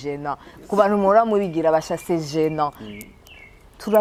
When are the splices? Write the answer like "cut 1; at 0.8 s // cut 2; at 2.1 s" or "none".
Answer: none

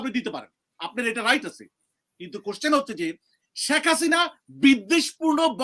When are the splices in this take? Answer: none

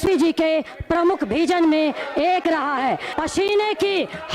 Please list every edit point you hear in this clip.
cut 1; at 3.1 s

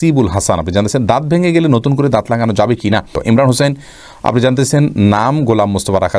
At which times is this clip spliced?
cut 1; at 3.1 s

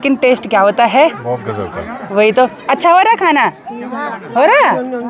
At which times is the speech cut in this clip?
none

